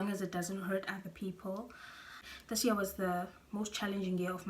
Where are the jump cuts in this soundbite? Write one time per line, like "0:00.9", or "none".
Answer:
0:02.3

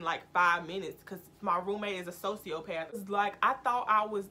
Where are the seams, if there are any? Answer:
0:03.0

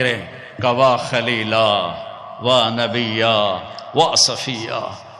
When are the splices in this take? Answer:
none

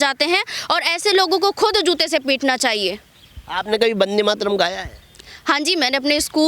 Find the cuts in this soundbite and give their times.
none

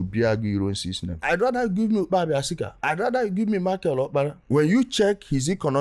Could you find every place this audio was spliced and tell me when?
0:01.1
0:04.4

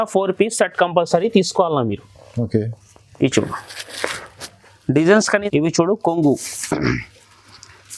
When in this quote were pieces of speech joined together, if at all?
0:05.4

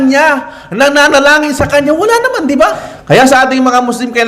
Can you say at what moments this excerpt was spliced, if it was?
0:02.9

